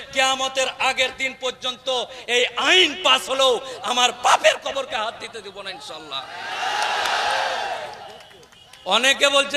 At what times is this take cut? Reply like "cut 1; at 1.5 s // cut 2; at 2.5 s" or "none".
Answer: none